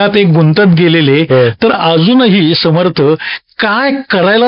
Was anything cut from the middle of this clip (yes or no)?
no